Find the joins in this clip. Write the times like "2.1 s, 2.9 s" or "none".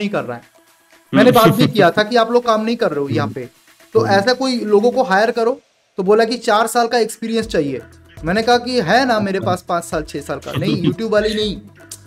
none

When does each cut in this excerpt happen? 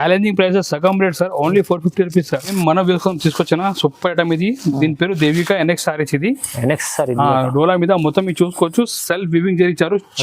2.5 s

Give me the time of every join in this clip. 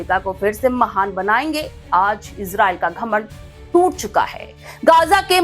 1.8 s

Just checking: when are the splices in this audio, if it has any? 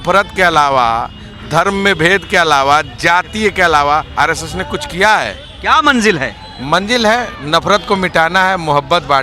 5.5 s

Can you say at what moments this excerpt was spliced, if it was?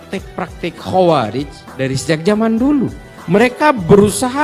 none

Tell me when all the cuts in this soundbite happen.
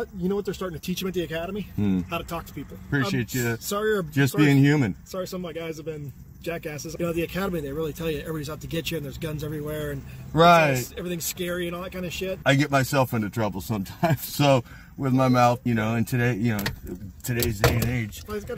2.9 s, 6.8 s, 12.4 s, 15.6 s

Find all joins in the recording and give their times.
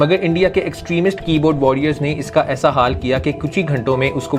none

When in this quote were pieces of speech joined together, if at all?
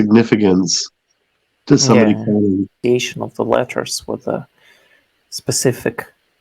2.7 s

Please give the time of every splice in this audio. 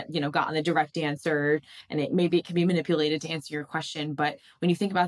none

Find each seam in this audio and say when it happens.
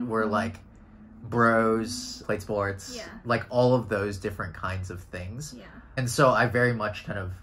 2.1 s, 5.8 s

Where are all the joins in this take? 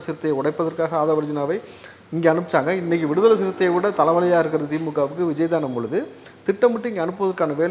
none

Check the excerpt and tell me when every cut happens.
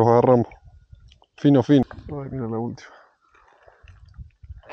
1.8 s

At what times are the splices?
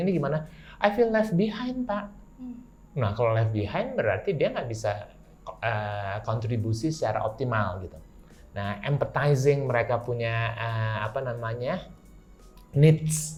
none

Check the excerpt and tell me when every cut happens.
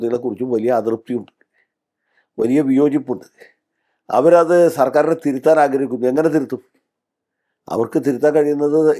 none

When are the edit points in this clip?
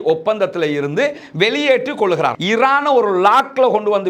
2.4 s

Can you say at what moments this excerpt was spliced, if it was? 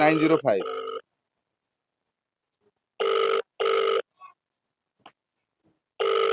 none

